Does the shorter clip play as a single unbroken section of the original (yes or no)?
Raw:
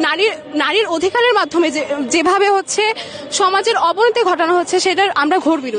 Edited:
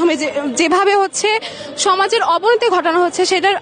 yes